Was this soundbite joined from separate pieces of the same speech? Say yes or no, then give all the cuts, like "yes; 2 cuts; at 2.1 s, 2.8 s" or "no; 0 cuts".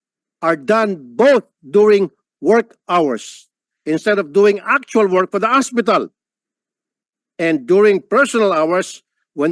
no; 0 cuts